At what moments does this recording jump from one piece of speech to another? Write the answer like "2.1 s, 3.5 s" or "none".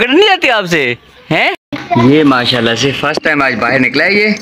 1.7 s